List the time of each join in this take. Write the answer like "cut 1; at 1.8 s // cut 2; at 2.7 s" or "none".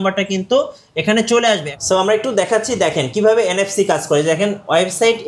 cut 1; at 1.7 s